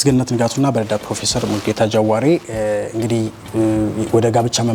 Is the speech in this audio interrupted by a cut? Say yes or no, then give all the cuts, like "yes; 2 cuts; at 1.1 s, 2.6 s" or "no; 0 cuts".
no; 0 cuts